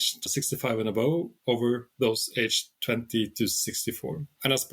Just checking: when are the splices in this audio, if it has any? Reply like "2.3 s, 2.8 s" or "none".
none